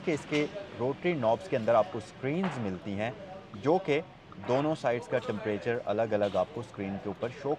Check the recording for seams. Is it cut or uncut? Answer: uncut